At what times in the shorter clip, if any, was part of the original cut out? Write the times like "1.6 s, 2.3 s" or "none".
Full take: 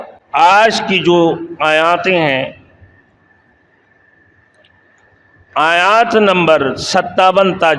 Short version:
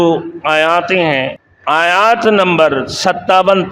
1.5 s